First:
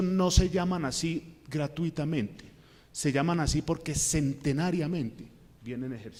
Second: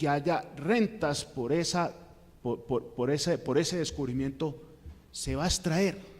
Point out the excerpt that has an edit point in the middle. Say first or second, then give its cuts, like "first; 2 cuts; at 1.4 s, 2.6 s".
second; 1 cut; at 5.2 s